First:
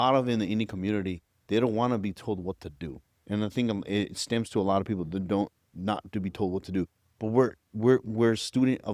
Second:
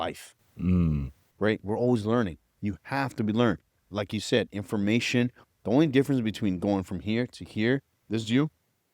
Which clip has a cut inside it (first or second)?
second